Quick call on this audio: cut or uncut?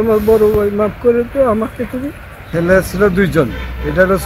cut